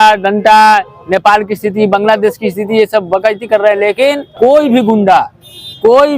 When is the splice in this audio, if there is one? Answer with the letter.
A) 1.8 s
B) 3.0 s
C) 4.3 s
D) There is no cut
C